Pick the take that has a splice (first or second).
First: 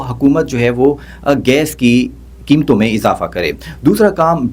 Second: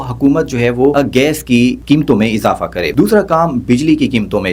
second